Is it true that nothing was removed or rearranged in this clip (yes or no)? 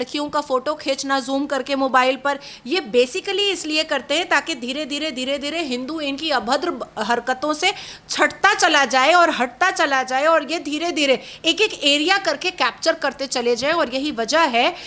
yes